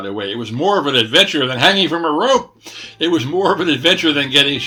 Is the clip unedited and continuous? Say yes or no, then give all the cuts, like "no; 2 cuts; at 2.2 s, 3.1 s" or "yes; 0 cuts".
yes; 0 cuts